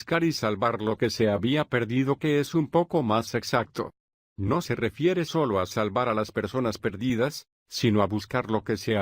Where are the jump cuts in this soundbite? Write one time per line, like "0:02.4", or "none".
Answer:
0:01.4
0:03.4